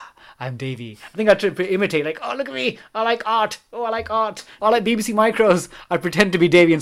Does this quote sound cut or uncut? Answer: cut